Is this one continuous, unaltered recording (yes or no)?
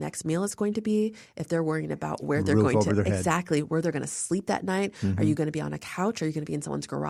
yes